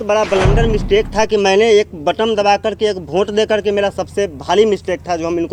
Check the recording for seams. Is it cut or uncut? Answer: uncut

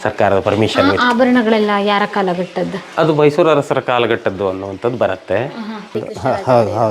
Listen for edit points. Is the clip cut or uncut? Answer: cut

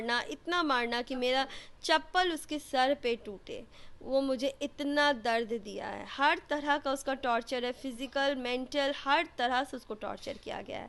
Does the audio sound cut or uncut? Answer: uncut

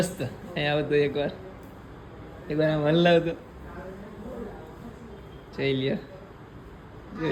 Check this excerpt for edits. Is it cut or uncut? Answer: uncut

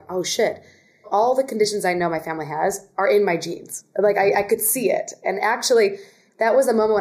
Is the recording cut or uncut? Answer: cut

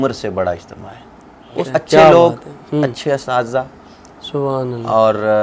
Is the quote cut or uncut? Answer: cut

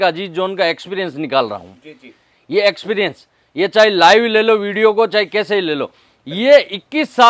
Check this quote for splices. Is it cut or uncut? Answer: uncut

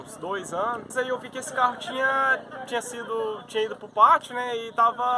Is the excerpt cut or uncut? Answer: cut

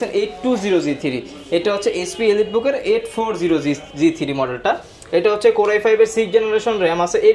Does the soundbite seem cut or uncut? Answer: uncut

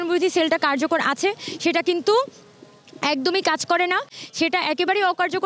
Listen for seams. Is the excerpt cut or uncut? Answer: uncut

